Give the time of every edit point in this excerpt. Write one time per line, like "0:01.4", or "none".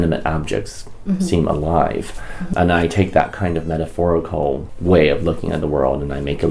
0:02.5
0:04.7